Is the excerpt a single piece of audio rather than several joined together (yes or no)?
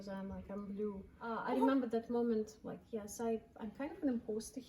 no